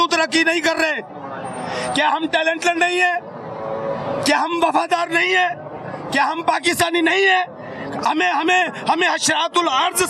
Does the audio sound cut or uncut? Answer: uncut